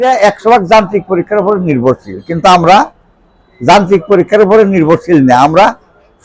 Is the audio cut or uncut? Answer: uncut